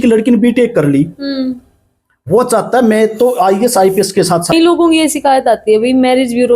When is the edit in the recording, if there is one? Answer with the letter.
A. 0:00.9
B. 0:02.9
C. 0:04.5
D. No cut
C